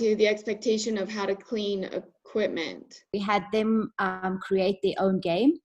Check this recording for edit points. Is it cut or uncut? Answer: cut